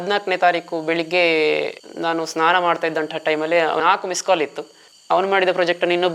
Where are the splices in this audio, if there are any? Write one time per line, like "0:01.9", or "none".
0:03.8
0:04.9

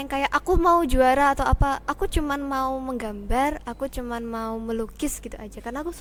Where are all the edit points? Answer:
none

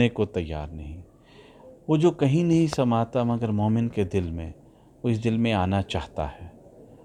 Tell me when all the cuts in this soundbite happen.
none

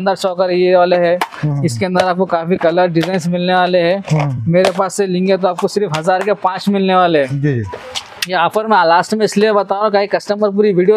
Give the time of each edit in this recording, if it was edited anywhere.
none

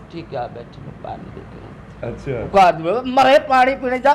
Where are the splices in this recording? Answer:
none

